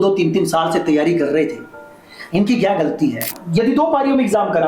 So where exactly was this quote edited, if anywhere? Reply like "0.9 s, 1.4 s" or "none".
3.3 s